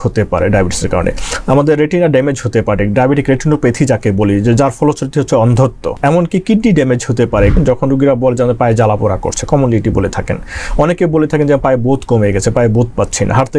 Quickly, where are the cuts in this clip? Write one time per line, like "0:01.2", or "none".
0:05.9
0:07.6